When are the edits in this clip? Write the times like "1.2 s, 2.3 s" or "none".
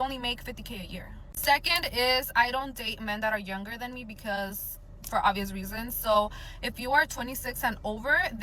2.3 s

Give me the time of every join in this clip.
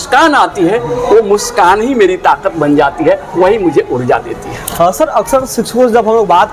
none

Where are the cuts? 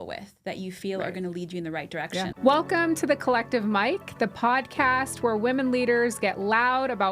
2.3 s

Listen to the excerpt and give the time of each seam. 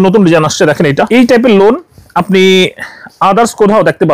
1.1 s

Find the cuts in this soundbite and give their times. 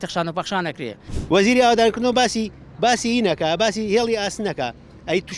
1.1 s

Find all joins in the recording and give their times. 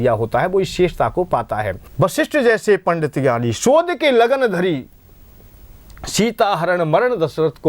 1.8 s

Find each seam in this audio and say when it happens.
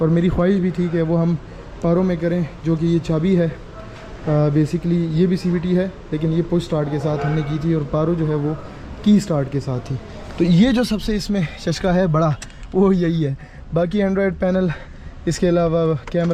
none

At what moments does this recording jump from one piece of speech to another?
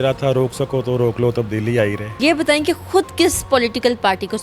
2.1 s

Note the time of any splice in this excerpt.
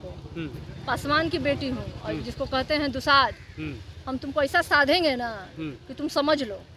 none

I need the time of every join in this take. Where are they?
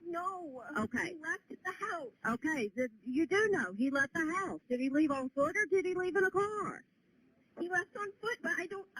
4.1 s

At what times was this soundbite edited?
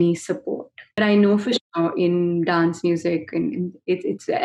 1.0 s

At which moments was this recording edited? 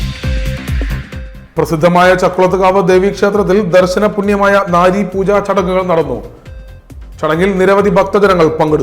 1.0 s

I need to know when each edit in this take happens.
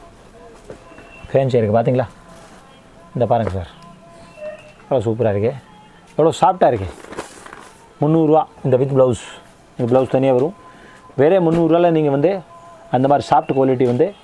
none

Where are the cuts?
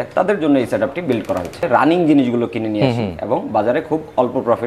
1.7 s

